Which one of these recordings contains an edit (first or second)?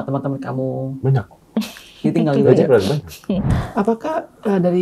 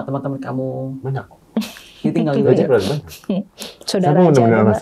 first